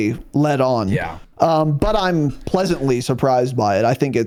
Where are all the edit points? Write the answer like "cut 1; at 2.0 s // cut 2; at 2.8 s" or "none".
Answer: none